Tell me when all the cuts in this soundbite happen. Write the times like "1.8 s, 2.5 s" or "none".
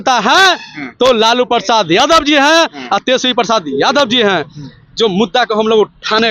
none